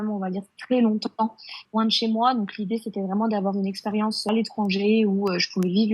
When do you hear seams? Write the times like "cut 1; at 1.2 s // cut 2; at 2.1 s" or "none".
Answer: cut 1; at 1.6 s // cut 2; at 4.3 s